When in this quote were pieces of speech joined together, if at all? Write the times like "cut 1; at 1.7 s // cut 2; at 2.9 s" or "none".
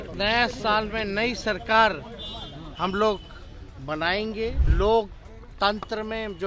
cut 1; at 4.6 s